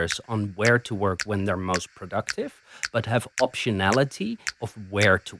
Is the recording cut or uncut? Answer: cut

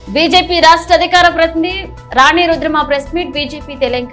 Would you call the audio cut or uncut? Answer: uncut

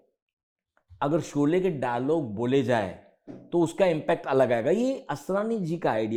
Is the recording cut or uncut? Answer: uncut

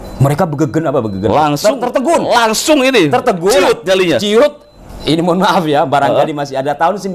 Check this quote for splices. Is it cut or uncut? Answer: uncut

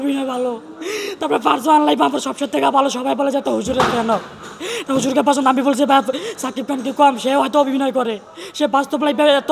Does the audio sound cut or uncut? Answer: uncut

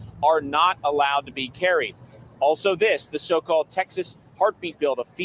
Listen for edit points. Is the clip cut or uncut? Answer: uncut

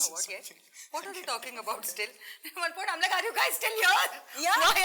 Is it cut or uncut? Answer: uncut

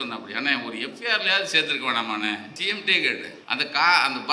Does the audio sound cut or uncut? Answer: cut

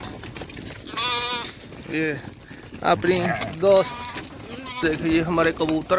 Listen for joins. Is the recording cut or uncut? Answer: cut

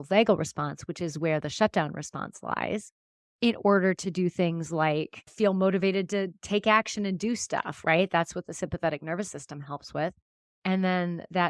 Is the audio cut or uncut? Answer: cut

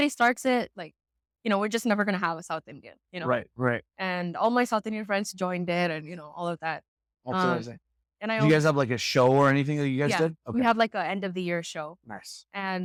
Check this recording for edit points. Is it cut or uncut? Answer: uncut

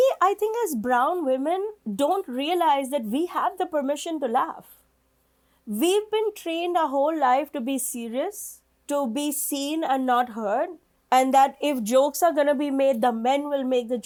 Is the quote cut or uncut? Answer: uncut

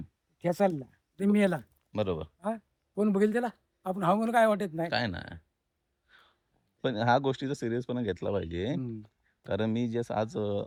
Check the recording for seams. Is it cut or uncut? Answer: uncut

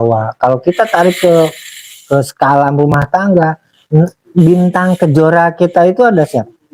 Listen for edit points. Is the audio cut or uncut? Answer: uncut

